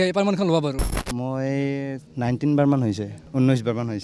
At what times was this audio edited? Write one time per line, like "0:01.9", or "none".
0:00.9
0:02.0
0:03.1